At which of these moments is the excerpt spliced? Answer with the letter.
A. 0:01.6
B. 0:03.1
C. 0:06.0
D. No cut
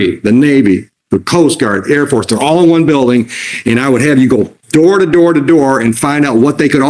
D